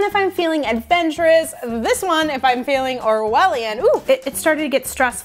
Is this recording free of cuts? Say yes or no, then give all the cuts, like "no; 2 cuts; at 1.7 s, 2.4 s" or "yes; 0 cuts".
no; 1 cut; at 4.0 s